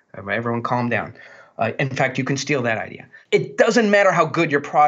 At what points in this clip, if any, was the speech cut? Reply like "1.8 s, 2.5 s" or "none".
3.1 s